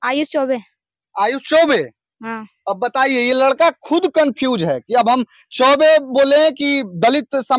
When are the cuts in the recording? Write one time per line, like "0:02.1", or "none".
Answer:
none